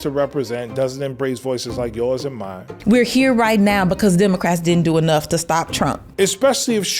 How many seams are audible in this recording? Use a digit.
2